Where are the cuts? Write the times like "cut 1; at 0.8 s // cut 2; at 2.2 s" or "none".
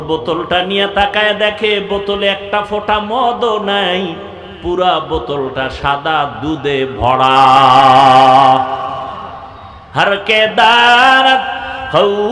none